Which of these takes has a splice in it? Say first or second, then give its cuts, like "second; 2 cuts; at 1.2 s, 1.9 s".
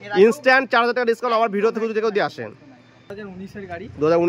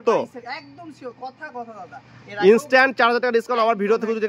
first; 1 cut; at 3.1 s